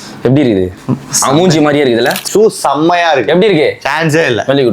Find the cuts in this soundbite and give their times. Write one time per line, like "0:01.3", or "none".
0:02.2